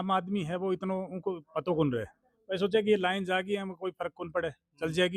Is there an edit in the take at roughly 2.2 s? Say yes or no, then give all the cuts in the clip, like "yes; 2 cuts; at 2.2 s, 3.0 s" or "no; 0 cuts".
no; 0 cuts